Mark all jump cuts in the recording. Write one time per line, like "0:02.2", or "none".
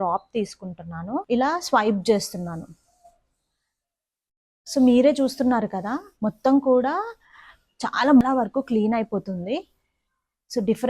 0:01.2
0:08.2